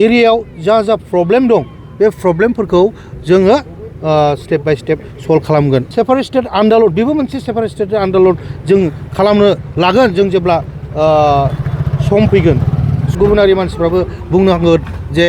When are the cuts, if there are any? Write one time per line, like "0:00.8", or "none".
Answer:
0:05.9
0:13.2